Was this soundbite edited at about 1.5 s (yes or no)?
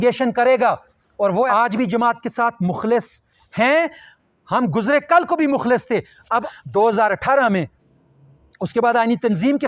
yes